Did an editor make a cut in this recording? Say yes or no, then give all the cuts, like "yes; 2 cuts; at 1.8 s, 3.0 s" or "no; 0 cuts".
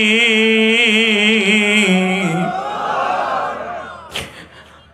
no; 0 cuts